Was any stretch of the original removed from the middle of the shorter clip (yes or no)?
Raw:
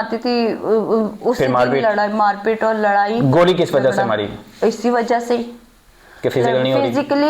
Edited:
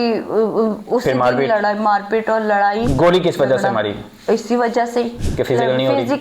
yes